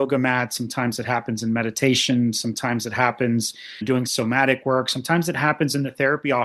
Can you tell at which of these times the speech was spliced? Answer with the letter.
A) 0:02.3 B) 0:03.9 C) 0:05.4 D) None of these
B